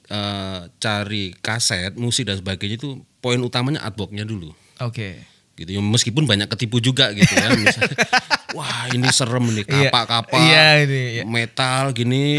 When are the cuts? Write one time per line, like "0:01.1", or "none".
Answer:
none